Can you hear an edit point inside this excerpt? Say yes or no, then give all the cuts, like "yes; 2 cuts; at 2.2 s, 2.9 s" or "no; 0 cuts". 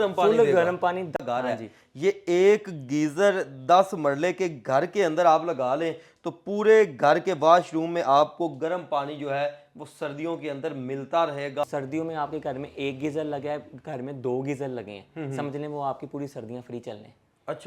yes; 2 cuts; at 1.2 s, 11.6 s